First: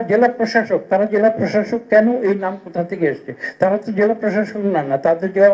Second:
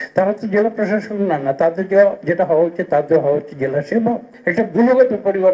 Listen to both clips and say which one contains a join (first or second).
second